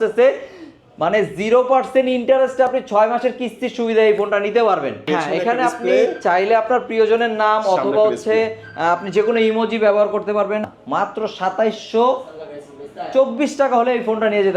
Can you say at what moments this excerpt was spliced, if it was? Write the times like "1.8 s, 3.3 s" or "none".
5.0 s, 10.8 s